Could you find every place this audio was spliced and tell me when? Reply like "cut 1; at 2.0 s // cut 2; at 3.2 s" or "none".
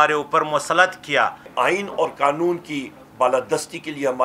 cut 1; at 1.4 s